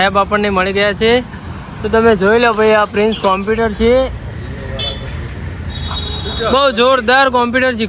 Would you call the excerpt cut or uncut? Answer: uncut